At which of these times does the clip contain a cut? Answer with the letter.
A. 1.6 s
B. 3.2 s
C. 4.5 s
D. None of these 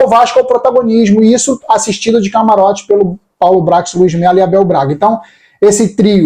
D